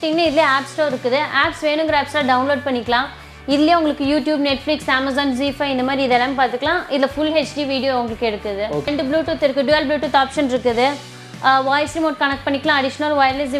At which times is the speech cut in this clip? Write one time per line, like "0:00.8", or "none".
0:08.9